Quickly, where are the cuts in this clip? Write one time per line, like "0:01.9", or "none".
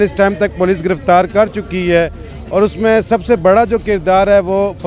none